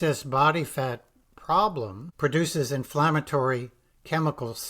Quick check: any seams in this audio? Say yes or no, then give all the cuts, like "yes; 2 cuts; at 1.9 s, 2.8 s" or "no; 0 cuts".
yes; 1 cut; at 2.0 s